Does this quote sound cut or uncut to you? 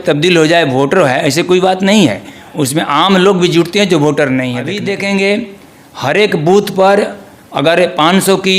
cut